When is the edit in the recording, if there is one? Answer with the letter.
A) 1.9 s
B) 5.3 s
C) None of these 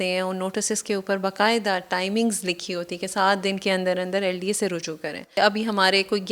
B